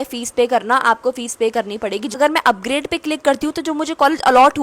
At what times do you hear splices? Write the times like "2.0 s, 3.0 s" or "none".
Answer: 2.2 s